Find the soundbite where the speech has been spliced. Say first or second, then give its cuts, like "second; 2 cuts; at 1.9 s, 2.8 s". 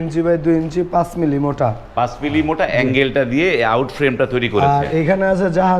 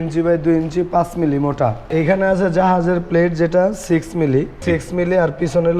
second; 2 cuts; at 1.9 s, 4.6 s